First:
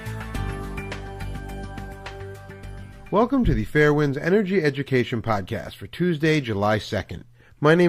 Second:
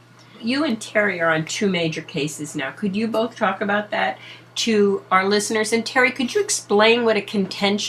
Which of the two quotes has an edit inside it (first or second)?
second